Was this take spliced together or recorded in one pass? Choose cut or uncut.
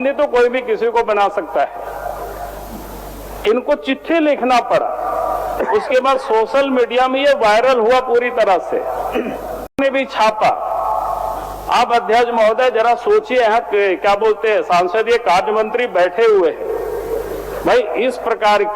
uncut